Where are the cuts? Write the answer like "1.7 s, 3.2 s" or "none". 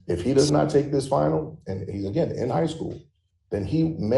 none